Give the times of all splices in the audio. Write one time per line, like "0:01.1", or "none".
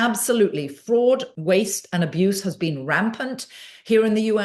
0:01.3